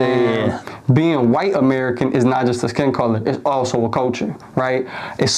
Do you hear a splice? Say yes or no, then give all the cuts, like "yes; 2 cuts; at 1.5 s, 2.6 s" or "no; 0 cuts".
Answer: no; 0 cuts